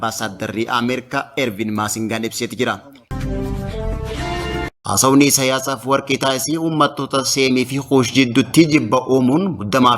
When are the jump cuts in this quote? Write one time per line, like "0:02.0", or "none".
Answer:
0:03.1
0:04.7